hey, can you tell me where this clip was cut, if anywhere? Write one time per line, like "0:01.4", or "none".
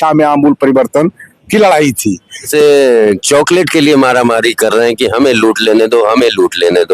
0:02.5